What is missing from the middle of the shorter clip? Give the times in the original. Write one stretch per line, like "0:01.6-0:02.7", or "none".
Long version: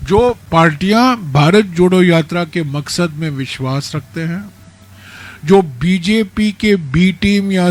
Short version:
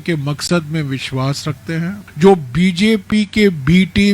0:04.5-0:05.3